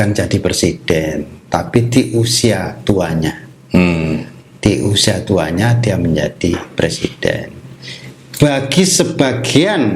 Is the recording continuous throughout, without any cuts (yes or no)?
yes